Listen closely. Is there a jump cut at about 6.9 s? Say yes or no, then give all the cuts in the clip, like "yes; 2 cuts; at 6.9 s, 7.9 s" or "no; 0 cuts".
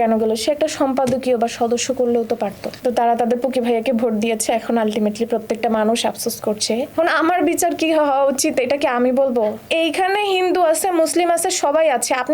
yes; 3 cuts; at 2.7 s, 6.9 s, 9.6 s